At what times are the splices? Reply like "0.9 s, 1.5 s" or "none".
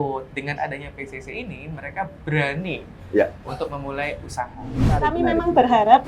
5.1 s